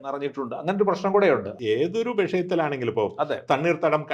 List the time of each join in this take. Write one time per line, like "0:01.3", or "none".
0:01.5